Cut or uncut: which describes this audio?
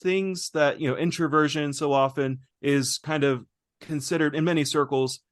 cut